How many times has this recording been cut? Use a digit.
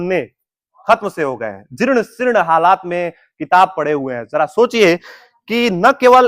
0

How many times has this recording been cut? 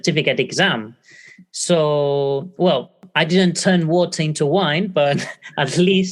1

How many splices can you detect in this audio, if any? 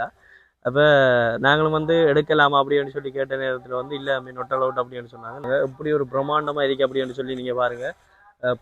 1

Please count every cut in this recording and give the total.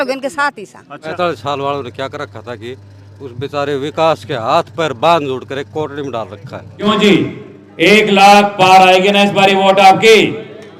2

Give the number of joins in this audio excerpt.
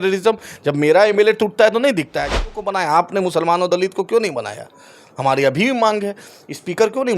1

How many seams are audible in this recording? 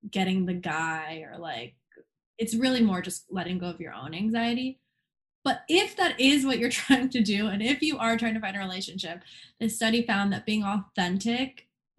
0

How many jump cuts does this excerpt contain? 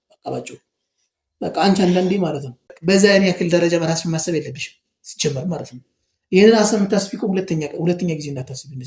1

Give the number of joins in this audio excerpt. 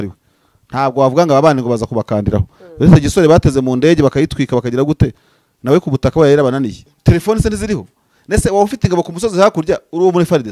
1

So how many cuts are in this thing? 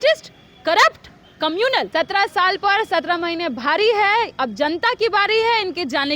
1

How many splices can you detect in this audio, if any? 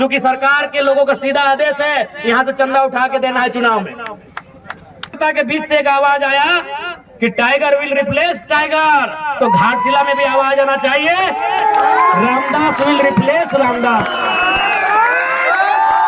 1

